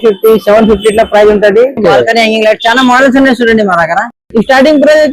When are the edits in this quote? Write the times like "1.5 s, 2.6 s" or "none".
1.8 s